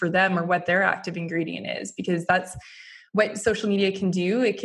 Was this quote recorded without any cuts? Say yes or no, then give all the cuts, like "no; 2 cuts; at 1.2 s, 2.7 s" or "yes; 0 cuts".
yes; 0 cuts